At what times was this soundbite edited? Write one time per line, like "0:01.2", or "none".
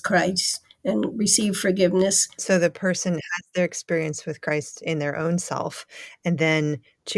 0:02.3

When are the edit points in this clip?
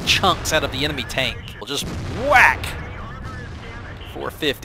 0:01.5

